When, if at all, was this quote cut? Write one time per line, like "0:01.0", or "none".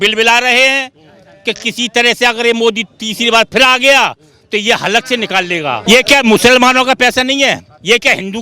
0:05.8